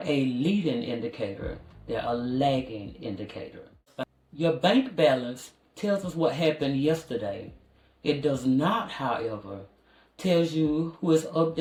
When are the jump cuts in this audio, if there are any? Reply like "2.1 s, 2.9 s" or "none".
none

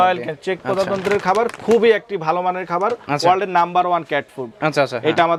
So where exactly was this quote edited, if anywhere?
none

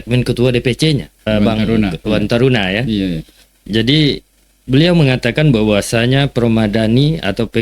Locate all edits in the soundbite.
1.1 s

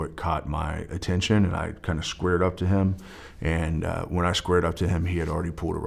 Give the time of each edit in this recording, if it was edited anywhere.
none

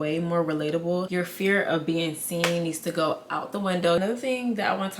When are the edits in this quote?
1.1 s, 4.0 s

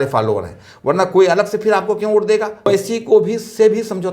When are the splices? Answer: 2.7 s

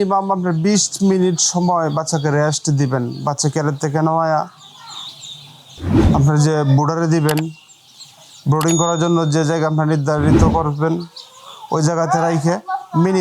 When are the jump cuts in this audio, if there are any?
none

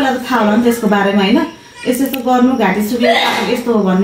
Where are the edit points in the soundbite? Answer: none

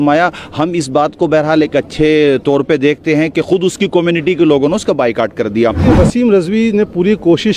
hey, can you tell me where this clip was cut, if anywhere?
5.9 s

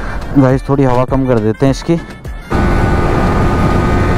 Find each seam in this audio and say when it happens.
2.5 s

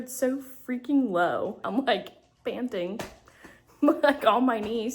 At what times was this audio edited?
1.6 s

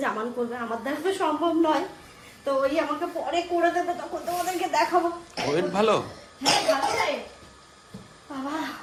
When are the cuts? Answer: none

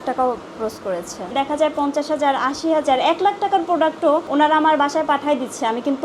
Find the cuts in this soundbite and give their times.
1.3 s

